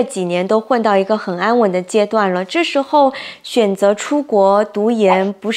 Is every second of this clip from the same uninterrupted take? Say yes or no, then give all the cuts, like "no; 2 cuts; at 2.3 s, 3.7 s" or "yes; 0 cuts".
yes; 0 cuts